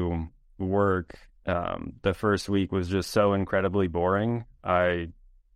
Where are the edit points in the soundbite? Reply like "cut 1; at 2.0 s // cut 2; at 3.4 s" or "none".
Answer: none